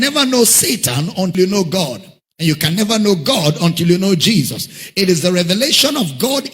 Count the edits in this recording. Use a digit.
1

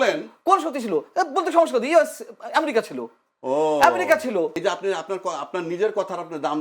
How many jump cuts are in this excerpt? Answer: 1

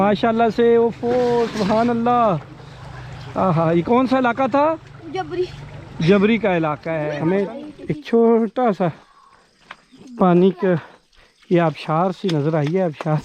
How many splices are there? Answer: 1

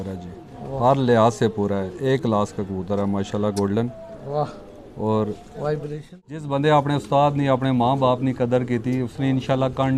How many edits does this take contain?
1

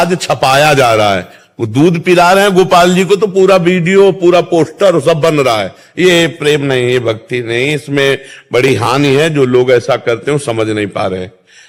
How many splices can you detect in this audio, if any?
0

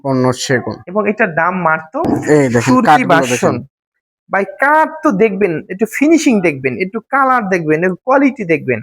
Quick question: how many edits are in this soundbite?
1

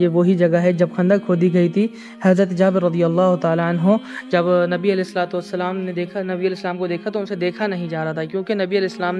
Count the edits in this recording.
0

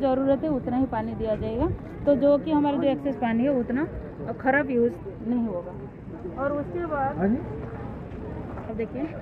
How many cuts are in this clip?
0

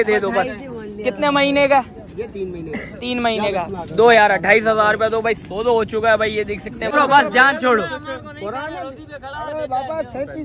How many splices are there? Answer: 1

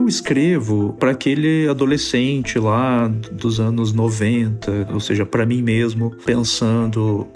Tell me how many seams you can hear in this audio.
1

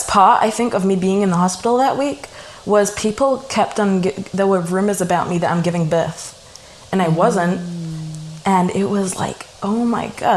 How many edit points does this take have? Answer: 0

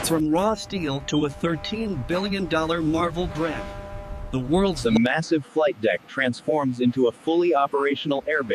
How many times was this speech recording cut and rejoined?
1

